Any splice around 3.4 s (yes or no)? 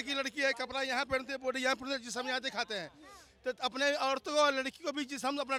no